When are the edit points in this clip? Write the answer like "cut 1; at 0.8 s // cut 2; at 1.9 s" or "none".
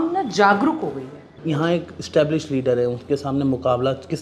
cut 1; at 1.3 s